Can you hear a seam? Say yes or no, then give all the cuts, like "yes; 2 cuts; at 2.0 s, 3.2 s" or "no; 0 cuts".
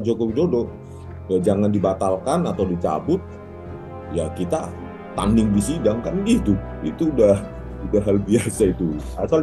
no; 0 cuts